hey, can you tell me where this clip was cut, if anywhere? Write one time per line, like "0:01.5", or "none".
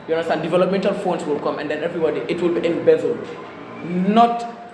none